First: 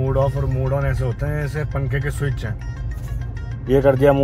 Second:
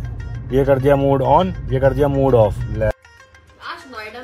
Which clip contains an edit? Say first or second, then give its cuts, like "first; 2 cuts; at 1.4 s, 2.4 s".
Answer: second; 1 cut; at 3.1 s